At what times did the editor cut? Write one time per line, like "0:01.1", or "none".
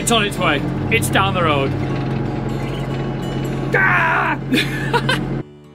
none